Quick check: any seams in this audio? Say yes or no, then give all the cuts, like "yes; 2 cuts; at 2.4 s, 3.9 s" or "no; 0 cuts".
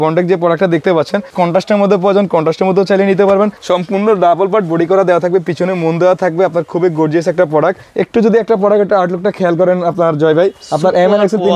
yes; 4 cuts; at 1.3 s, 3.6 s, 7.8 s, 10.6 s